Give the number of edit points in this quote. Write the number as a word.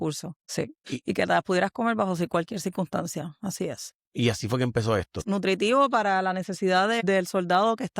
two